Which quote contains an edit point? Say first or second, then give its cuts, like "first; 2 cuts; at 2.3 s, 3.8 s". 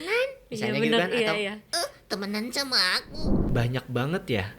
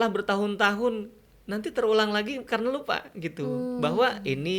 first; 1 cut; at 3.4 s